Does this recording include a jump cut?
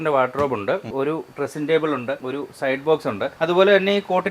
yes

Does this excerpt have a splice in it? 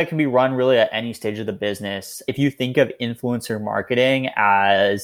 yes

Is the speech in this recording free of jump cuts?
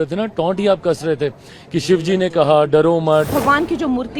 no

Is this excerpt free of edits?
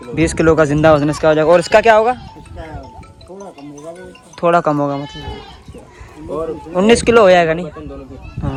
yes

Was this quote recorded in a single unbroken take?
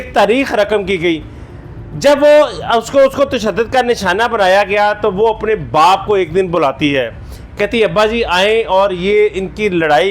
yes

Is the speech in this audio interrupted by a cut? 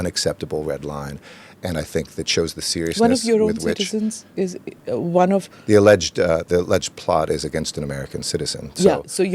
no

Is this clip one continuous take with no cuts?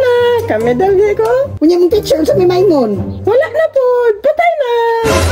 no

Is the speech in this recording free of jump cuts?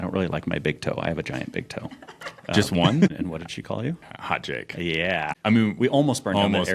no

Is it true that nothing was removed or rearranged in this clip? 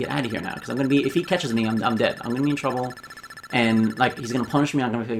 yes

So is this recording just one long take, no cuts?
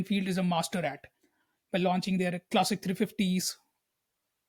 yes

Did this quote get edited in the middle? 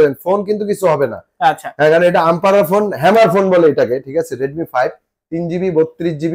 no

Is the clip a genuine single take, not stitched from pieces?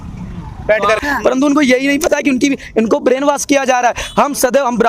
no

